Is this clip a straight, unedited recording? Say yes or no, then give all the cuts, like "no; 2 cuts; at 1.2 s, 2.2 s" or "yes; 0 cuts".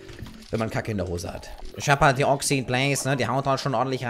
no; 1 cut; at 1.5 s